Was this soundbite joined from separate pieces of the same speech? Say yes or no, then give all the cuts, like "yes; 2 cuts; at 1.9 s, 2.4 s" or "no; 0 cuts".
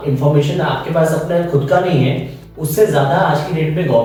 no; 0 cuts